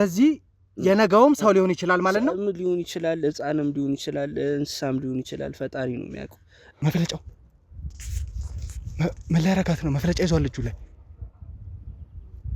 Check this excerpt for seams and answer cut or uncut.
cut